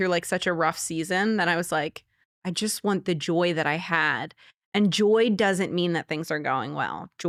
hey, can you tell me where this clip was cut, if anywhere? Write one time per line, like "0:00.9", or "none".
none